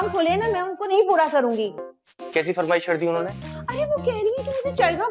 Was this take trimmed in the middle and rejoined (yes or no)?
no